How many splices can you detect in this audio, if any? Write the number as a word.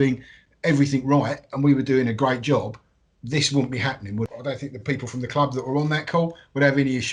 one